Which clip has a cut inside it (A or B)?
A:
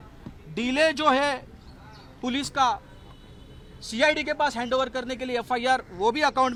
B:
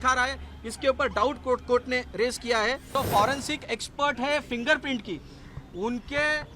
B